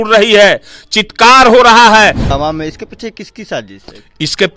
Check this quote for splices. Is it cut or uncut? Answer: cut